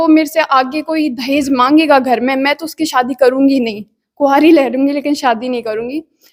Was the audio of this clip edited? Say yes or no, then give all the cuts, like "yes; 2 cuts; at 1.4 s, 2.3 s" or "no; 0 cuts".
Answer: no; 0 cuts